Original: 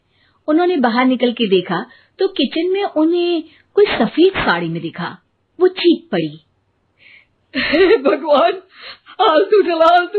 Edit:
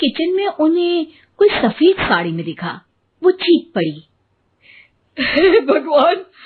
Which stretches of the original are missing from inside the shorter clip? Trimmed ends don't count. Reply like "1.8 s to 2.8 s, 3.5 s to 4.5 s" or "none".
none